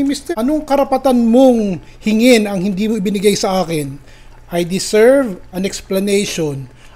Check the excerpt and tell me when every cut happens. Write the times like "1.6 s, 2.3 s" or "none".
none